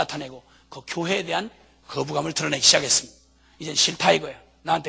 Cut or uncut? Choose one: cut